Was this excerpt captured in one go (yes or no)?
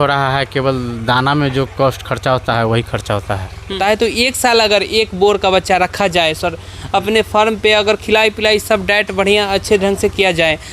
no